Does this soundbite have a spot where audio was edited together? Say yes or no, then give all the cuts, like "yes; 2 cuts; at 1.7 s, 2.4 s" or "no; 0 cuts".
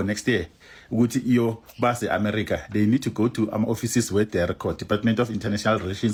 no; 0 cuts